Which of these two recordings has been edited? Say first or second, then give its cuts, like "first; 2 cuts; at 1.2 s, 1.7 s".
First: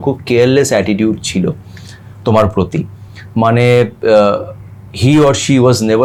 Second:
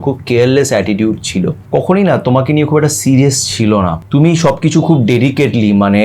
second; 2 cuts; at 1.6 s, 4.0 s